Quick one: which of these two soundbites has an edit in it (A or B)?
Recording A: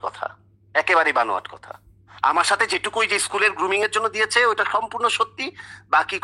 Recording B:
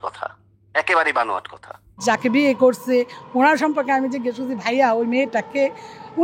B